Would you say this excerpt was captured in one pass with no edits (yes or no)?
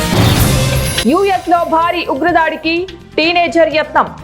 no